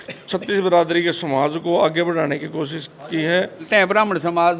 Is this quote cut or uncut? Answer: cut